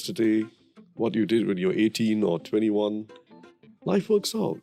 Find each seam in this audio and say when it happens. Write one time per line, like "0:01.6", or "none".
none

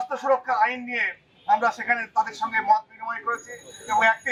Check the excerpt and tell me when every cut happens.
none

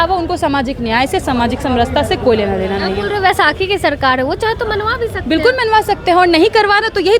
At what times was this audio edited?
none

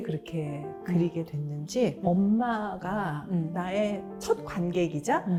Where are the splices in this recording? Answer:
none

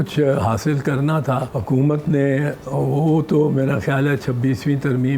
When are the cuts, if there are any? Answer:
0:01.5

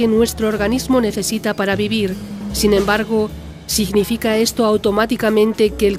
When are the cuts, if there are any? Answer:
none

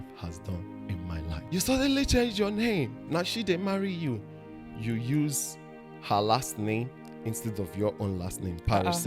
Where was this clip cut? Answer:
0:01.4
0:03.0

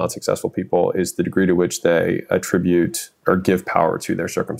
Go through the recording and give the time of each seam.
0:03.1

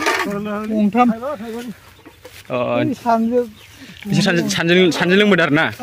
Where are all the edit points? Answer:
none

